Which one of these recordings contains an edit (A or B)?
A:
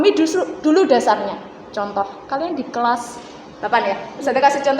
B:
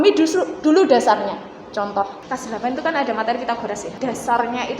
B